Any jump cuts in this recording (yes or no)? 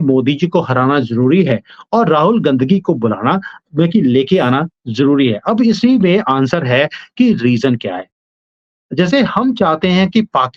no